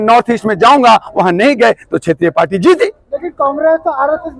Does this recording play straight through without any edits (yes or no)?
yes